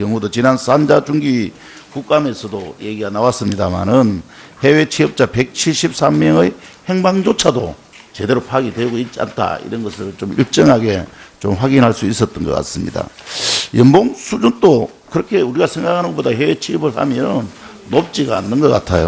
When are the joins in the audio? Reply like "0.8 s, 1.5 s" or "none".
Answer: 18.1 s